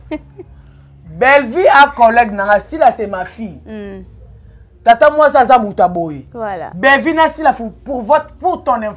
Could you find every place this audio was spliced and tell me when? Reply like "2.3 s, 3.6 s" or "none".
none